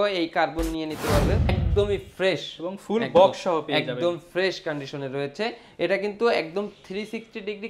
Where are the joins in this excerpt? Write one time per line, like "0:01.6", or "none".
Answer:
0:01.5